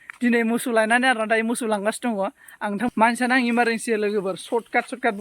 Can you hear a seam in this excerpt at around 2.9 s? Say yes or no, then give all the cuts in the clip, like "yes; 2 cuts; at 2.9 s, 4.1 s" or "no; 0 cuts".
yes; 1 cut; at 2.9 s